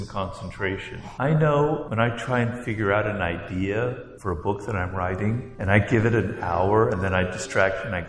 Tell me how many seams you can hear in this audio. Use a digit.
4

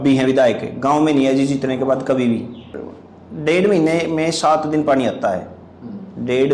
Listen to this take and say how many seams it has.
1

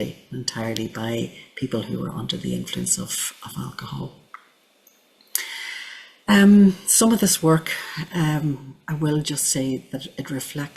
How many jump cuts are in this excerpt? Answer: 0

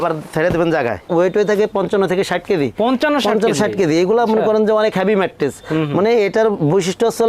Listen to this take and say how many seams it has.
1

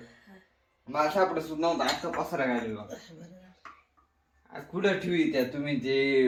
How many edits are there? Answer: 0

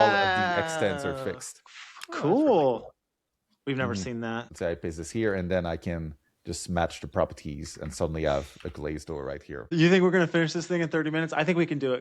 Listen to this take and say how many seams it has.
2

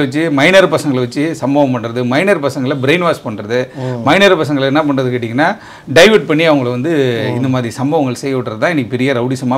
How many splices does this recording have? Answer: 0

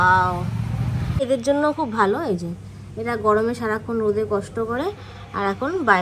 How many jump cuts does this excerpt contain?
1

